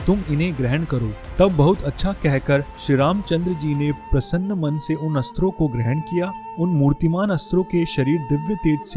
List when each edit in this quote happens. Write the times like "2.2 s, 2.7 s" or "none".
none